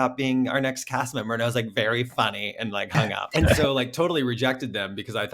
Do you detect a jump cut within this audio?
yes; 1 cut; at 3.2 s

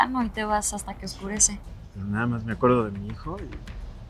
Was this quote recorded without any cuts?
no; 1 cut; at 1.6 s

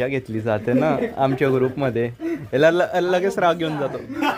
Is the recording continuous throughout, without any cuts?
yes; 0 cuts

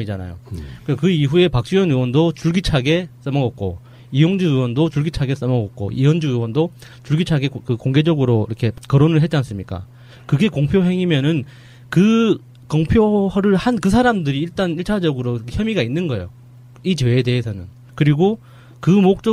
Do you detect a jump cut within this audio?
no; 0 cuts

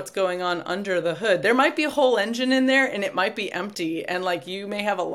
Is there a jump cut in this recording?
no; 0 cuts

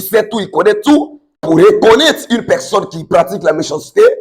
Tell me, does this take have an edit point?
yes; 1 cut; at 1.4 s

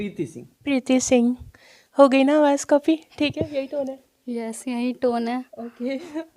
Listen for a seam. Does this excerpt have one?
no; 0 cuts

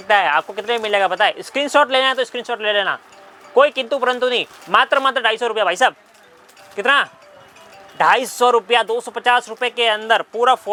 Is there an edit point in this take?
no; 0 cuts

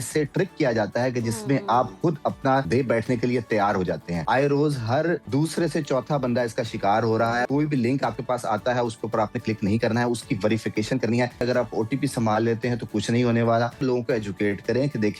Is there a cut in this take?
yes; 6 cuts; at 2.7 s, 4.1 s, 5.2 s, 7.4 s, 11.4 s, 13.8 s

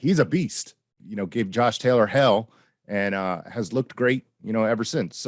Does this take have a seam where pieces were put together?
yes; 1 cut; at 0.9 s

